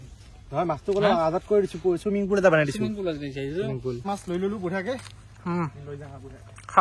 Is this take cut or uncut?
cut